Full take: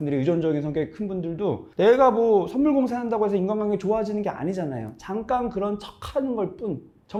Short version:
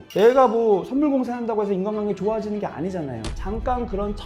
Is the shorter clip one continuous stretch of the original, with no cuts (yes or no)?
yes